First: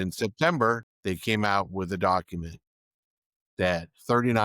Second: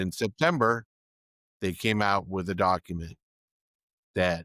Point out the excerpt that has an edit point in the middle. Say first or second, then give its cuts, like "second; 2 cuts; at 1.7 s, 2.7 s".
first; 1 cut; at 0.9 s